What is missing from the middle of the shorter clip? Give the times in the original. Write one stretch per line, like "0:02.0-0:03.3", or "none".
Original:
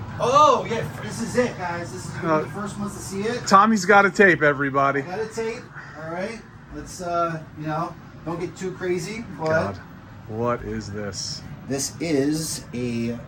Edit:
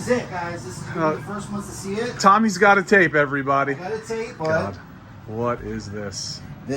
0:05.6-0:09.3